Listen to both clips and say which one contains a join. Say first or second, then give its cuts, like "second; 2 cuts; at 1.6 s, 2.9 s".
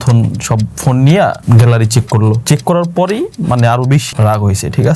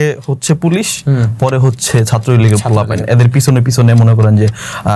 first; 3 cuts; at 1.4 s, 2.4 s, 4.1 s